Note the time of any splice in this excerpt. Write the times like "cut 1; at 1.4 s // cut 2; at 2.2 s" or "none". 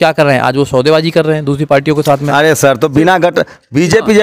none